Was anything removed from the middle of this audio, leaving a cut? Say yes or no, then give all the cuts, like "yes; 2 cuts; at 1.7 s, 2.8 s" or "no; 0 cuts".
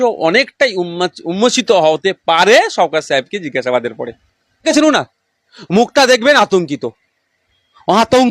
yes; 1 cut; at 4.6 s